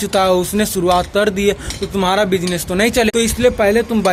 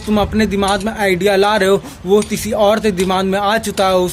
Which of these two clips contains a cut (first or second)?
first